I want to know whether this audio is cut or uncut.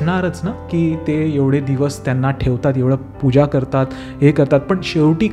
uncut